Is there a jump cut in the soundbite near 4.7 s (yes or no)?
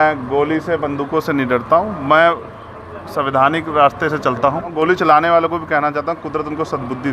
yes